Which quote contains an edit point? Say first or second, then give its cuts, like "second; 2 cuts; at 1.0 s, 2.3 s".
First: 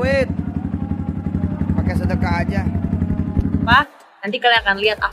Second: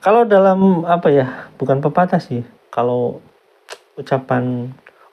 first; 1 cut; at 3.7 s